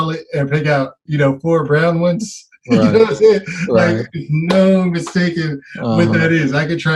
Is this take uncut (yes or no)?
yes